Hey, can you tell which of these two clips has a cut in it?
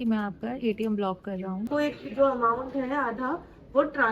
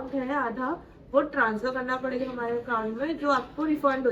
first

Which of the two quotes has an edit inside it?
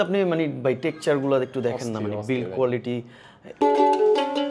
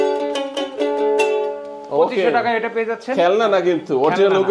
first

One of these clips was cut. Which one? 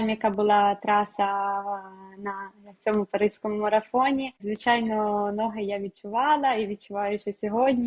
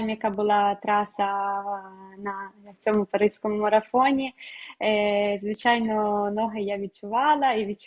first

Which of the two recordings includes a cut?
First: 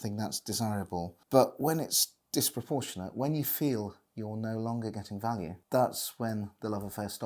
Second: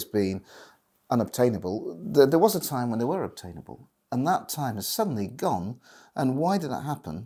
first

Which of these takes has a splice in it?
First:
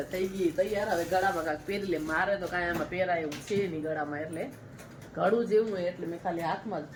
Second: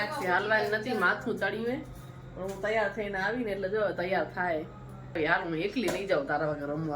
second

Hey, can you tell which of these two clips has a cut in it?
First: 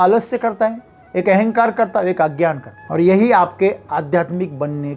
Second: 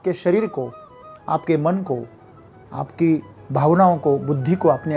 first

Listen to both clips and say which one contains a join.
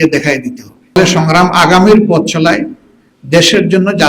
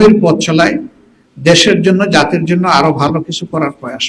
first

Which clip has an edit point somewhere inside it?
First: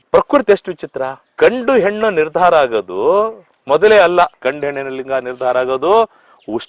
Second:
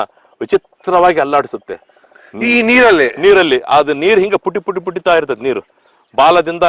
first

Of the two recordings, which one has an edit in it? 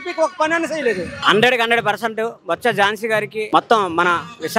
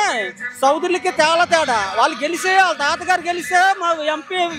first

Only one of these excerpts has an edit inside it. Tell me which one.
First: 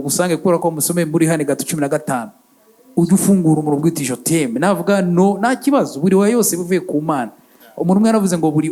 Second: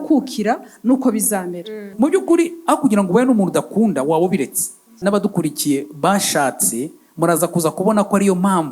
second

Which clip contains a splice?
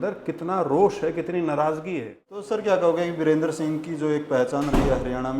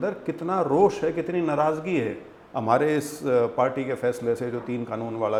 first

